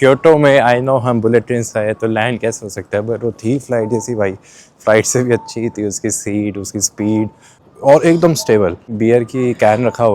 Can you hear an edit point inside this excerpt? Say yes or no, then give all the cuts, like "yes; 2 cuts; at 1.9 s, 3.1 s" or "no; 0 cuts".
yes; 2 cuts; at 7.6 s, 8.9 s